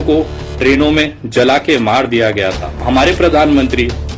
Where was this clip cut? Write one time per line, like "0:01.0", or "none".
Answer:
0:02.7